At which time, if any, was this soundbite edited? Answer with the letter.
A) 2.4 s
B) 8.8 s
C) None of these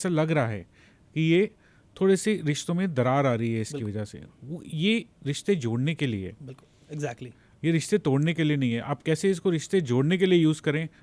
C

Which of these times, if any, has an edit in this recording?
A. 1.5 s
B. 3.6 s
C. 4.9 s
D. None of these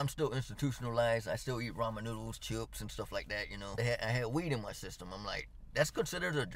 B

